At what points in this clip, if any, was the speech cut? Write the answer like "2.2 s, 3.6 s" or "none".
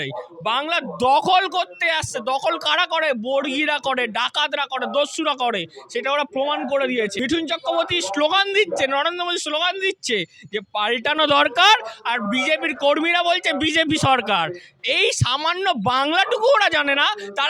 7.2 s